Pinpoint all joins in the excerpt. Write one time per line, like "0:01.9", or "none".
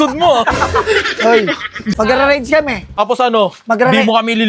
0:02.0
0:03.0

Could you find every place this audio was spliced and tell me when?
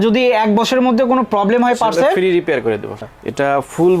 0:03.0

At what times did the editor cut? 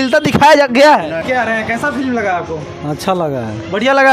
0:01.2

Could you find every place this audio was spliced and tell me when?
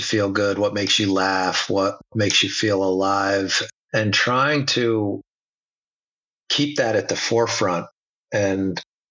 0:02.1
0:03.6

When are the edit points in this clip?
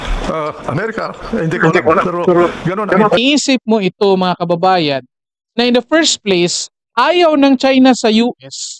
0:03.2

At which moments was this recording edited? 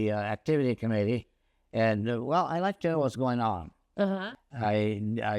0:04.3

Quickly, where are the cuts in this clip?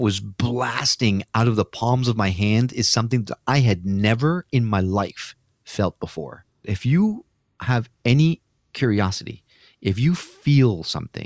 0:06.7

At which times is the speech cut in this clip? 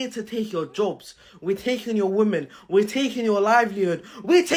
none

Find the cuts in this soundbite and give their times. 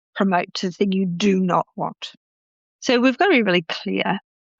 0:02.6

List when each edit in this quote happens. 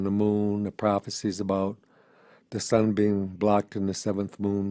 0:01.5

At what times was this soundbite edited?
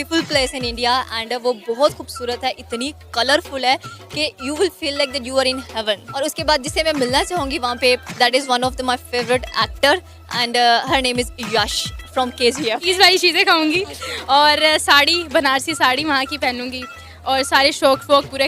0:06.1
0:12.8

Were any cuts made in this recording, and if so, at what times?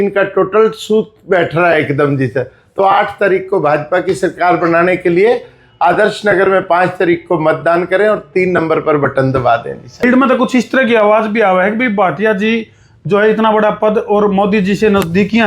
0:10.0

